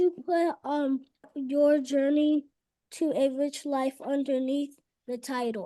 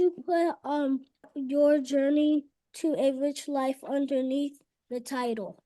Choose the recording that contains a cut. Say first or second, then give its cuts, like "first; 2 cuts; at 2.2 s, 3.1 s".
second; 1 cut; at 2.6 s